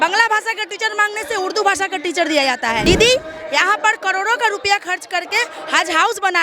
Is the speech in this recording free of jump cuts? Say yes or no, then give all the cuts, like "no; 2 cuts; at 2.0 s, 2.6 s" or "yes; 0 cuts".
no; 1 cut; at 2.8 s